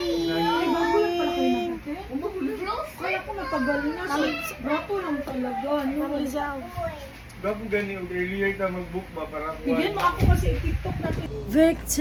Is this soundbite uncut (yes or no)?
yes